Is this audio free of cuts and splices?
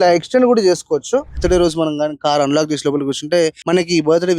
no; 2 cuts; at 1.4 s, 3.6 s

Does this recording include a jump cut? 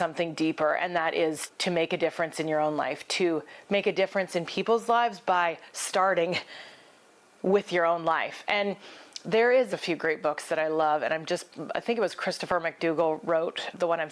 no; 0 cuts

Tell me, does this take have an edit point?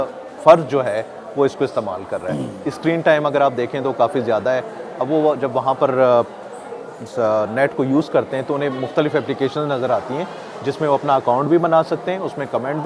no; 0 cuts

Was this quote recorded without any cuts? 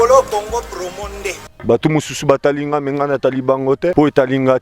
no; 1 cut; at 1.5 s

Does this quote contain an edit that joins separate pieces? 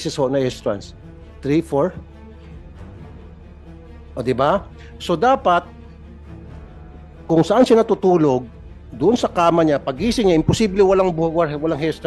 yes; 4 cuts; at 2.2 s, 4.1 s, 5.7 s, 7.3 s

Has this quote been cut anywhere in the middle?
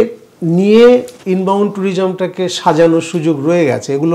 no; 0 cuts

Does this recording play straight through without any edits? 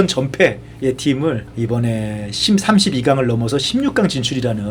yes; 0 cuts

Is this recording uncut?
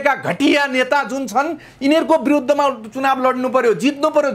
yes; 0 cuts

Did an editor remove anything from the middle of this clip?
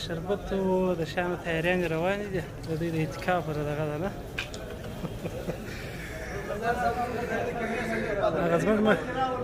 no; 0 cuts

